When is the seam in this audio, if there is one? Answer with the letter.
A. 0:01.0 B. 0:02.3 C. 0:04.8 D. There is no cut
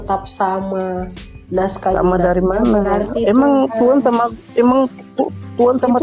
D